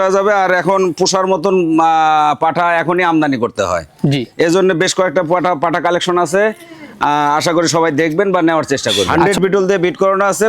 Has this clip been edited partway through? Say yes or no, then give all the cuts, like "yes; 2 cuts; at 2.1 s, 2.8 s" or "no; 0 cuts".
yes; 1 cut; at 9.1 s